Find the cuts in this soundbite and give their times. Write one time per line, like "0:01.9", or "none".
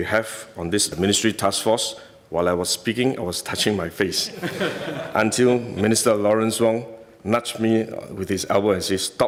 none